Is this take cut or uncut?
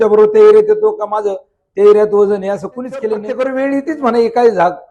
cut